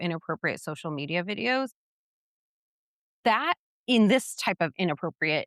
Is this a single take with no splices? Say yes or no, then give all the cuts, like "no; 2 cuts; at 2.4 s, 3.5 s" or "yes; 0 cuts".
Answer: yes; 0 cuts